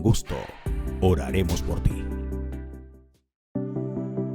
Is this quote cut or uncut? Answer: cut